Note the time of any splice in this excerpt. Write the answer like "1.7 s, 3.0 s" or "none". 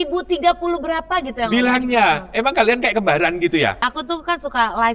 3.9 s